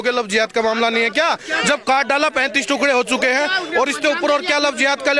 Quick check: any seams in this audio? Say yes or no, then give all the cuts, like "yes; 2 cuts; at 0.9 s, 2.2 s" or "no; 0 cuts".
no; 0 cuts